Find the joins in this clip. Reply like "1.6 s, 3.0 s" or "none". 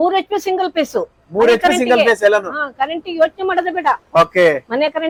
none